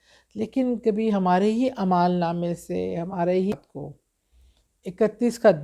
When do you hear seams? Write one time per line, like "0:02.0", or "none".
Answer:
0:03.5